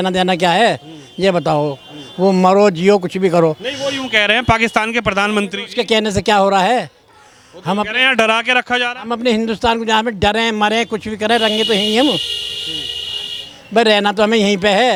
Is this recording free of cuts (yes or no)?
yes